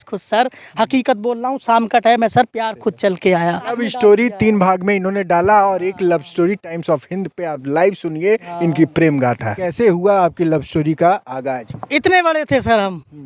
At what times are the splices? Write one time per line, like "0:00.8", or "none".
0:03.7
0:09.6

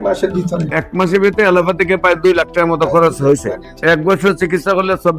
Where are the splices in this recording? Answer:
none

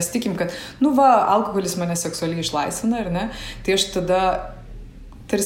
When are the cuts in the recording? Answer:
none

